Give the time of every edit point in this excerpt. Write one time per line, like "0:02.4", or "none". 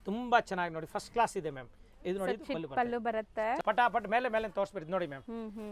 0:03.6